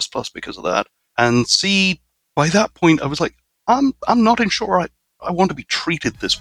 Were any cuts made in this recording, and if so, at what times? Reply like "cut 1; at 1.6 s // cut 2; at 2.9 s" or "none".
cut 1; at 1.0 s